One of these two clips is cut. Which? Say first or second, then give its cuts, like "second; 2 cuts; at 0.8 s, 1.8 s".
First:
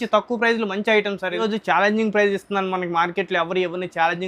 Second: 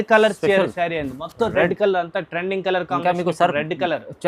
first; 1 cut; at 1.4 s